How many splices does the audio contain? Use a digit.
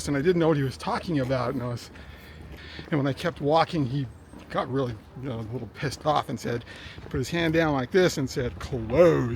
1